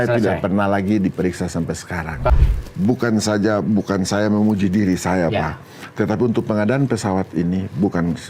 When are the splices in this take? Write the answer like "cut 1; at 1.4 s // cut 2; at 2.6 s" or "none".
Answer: cut 1; at 2.3 s